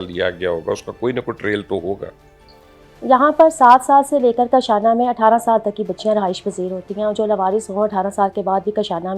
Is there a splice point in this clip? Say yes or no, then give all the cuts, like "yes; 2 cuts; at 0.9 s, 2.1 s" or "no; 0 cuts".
no; 0 cuts